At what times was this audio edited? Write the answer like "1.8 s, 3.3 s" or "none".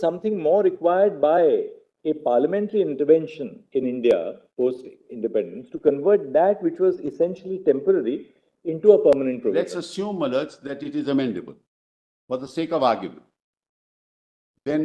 none